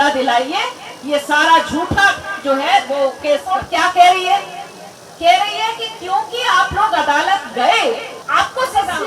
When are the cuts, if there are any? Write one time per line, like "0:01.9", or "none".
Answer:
0:03.4
0:08.1